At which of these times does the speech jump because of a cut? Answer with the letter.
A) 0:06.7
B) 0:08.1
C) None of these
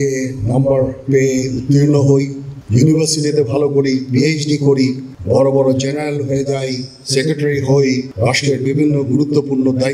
B